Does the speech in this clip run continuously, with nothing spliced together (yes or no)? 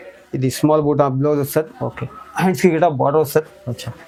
yes